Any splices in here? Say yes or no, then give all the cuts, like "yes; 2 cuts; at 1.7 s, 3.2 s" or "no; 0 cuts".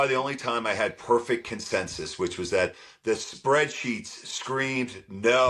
no; 0 cuts